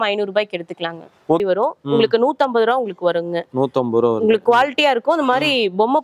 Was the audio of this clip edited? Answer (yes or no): yes